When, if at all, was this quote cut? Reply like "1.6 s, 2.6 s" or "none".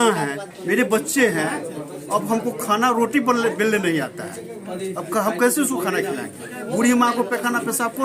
none